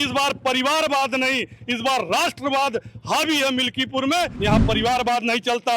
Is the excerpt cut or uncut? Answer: cut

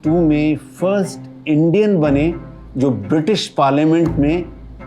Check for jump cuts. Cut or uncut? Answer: uncut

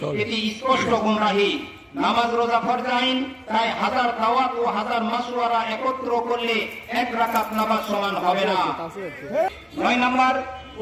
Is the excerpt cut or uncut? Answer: cut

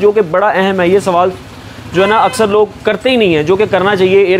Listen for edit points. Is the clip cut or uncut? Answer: uncut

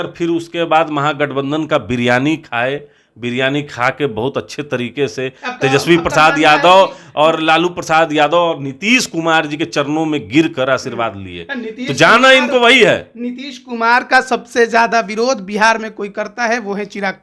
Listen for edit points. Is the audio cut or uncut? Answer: uncut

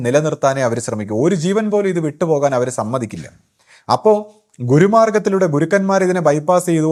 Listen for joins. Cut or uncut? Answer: uncut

